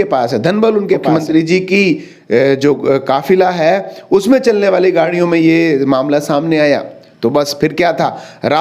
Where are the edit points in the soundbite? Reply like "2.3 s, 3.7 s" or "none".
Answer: 1.0 s